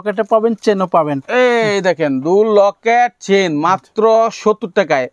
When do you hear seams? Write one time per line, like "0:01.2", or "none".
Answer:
none